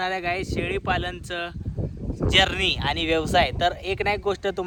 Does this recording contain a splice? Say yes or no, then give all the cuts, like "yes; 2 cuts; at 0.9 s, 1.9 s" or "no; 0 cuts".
no; 0 cuts